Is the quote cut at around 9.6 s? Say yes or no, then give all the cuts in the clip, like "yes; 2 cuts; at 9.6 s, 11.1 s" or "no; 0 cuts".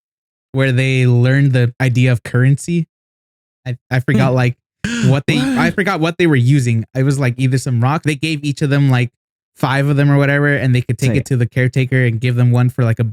no; 2 cuts; at 1.7 s, 8.0 s